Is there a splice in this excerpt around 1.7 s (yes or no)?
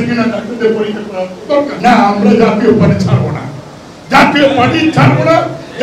yes